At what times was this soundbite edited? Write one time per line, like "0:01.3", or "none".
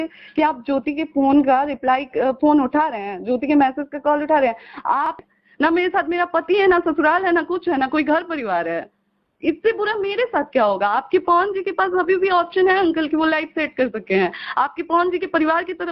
0:05.2